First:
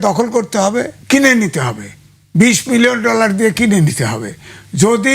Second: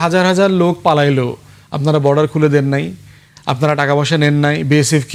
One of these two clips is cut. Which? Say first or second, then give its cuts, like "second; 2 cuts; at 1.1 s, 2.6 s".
first; 1 cut; at 0.9 s